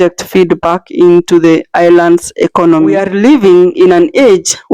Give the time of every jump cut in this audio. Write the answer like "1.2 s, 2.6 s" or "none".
3.0 s